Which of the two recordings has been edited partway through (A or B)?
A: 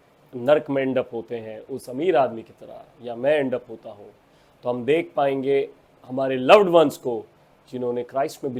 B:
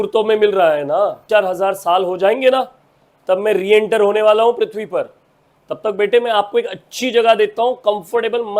B